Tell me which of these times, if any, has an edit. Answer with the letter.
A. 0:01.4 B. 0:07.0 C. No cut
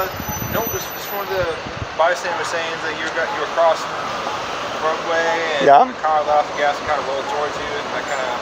C